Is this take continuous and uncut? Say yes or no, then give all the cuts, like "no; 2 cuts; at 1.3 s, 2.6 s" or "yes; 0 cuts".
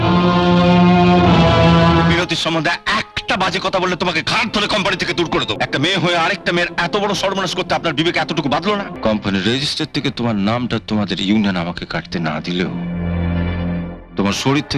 no; 3 cuts; at 2.1 s, 5.5 s, 8.9 s